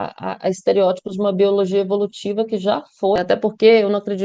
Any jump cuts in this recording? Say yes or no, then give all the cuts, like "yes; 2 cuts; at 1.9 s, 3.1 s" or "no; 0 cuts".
yes; 1 cut; at 3.2 s